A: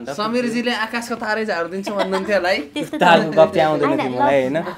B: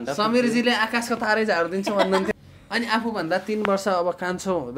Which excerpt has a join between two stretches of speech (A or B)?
B